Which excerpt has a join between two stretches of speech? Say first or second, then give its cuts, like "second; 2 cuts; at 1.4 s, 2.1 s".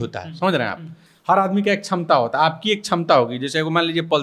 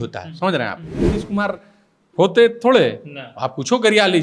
second; 1 cut; at 1.1 s